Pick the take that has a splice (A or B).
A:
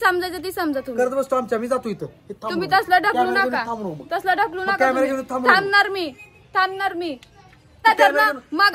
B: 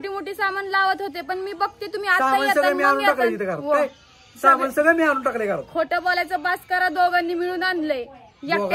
A